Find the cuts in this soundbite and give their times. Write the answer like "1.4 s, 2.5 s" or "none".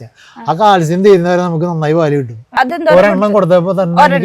2.6 s

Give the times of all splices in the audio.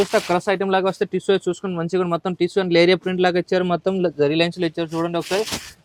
none

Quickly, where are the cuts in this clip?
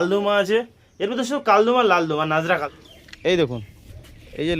2.7 s

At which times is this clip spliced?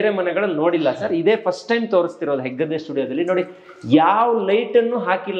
none

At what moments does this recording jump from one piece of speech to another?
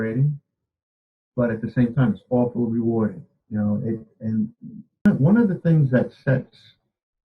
5.1 s

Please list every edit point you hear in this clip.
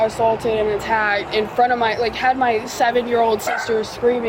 none

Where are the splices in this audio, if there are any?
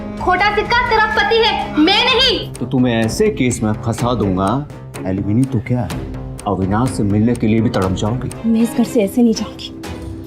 2.5 s, 8.3 s

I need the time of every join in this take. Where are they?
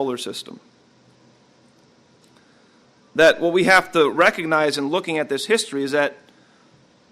2.8 s

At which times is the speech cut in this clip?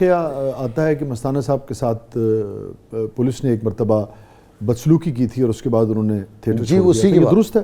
none

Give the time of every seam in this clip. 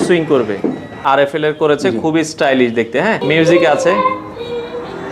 0.9 s, 3.2 s

